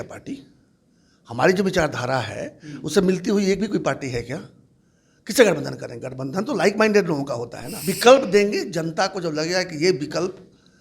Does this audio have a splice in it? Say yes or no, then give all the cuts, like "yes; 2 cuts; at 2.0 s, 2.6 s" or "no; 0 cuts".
yes; 1 cut; at 7.7 s